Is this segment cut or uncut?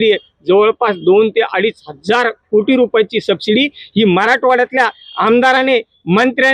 uncut